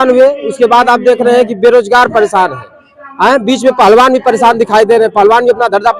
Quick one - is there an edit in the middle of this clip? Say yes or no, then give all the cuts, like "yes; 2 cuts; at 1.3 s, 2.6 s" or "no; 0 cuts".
no; 0 cuts